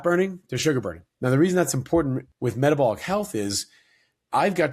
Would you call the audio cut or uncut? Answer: cut